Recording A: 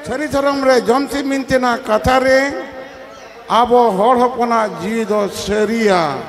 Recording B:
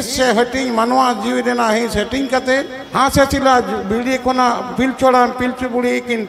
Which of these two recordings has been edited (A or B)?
B